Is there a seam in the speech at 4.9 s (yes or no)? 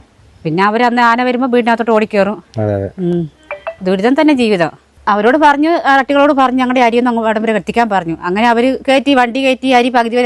yes